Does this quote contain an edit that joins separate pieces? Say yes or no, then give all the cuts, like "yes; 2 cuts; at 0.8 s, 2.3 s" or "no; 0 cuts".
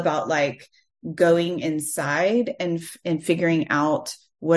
no; 0 cuts